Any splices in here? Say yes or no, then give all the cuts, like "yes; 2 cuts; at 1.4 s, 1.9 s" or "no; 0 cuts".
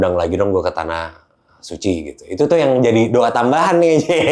no; 0 cuts